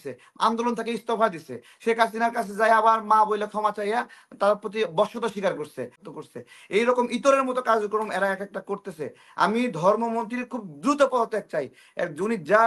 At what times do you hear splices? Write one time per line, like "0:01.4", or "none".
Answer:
0:06.0